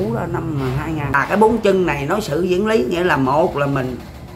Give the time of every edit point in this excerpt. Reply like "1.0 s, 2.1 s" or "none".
1.2 s